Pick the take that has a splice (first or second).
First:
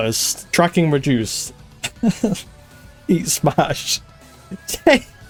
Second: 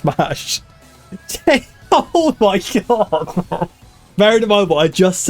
second